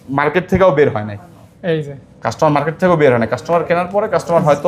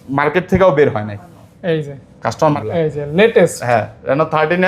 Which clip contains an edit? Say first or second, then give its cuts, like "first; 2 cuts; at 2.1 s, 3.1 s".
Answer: second; 1 cut; at 2.6 s